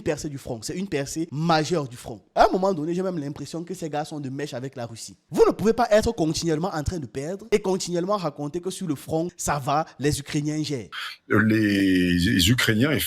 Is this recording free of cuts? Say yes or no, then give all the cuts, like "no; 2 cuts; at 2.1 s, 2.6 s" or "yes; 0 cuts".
no; 2 cuts; at 2.3 s, 10.9 s